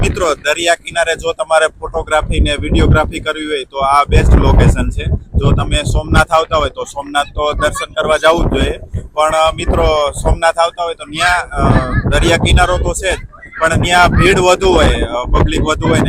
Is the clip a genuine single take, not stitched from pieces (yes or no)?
yes